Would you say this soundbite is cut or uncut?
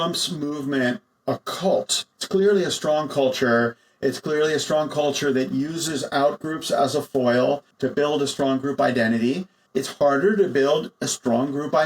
cut